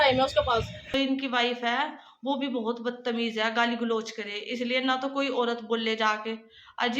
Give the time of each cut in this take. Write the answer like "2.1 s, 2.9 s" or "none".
0.9 s